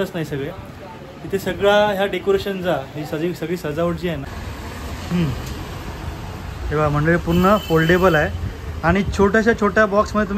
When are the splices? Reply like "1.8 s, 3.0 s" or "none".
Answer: 4.3 s